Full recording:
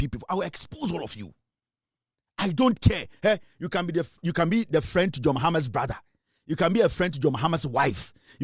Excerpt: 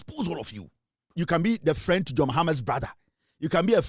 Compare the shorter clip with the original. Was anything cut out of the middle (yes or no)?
yes